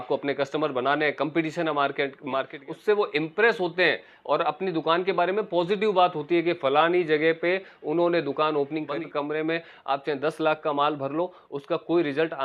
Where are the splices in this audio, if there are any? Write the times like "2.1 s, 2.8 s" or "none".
2.5 s, 8.9 s